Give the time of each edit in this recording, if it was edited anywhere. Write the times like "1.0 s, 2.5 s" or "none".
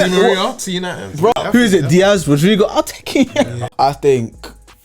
1.3 s, 3.6 s